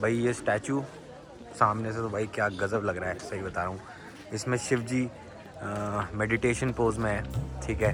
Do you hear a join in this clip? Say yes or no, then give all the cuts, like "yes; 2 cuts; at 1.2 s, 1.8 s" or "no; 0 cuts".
no; 0 cuts